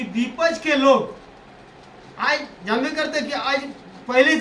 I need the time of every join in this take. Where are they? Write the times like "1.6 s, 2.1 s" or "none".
none